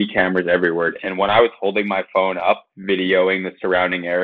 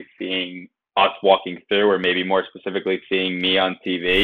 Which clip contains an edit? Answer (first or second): first